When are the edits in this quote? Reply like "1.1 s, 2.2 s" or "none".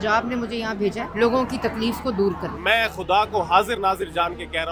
1.1 s, 2.5 s